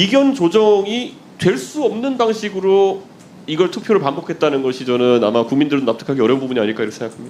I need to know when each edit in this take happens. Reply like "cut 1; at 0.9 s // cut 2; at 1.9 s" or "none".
none